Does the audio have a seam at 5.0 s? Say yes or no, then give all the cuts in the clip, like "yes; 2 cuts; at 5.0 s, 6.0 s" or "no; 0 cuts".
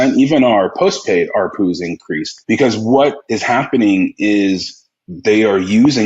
no; 2 cuts; at 2.3 s, 3.3 s